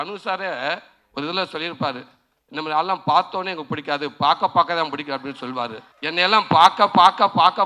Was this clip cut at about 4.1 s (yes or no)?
no